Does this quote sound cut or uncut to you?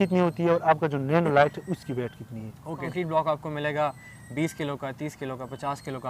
cut